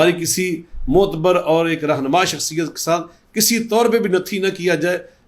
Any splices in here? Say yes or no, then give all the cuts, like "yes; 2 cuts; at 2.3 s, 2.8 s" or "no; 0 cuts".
no; 0 cuts